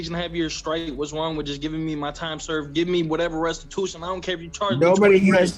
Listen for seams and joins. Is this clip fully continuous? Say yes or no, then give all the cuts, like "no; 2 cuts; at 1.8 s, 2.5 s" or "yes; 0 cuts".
yes; 0 cuts